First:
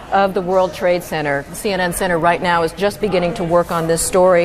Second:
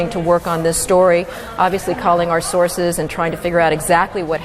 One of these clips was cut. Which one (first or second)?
second